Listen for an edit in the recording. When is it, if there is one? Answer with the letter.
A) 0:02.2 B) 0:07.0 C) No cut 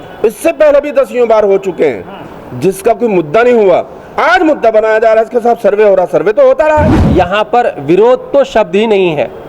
B